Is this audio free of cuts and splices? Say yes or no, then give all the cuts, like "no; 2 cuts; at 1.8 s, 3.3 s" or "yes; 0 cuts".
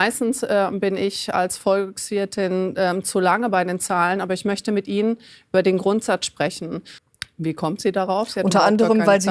no; 1 cut; at 6.9 s